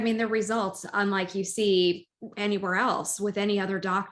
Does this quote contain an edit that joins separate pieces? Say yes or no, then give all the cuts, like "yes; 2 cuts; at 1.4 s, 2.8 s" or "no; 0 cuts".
no; 0 cuts